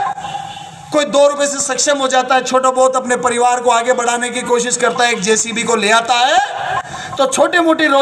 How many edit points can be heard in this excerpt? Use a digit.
0